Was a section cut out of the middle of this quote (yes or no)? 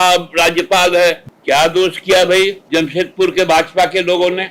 yes